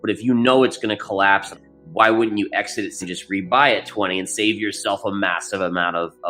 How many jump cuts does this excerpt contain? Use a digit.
2